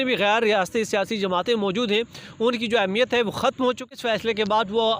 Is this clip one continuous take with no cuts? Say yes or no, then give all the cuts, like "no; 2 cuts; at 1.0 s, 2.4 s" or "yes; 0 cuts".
no; 1 cut; at 4.0 s